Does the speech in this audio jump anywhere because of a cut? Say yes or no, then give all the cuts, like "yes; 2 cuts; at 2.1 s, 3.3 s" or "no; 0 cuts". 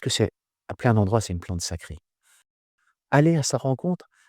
yes; 1 cut; at 2.6 s